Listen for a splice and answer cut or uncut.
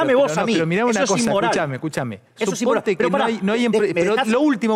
uncut